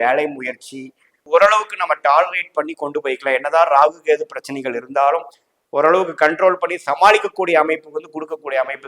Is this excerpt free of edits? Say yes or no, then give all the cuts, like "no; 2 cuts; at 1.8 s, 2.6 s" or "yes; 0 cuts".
no; 1 cut; at 1.2 s